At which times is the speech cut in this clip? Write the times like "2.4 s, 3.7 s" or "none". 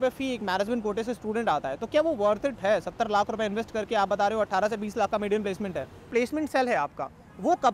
6.1 s